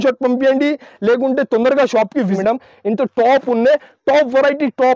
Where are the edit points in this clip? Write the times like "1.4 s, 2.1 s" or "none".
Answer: 2.4 s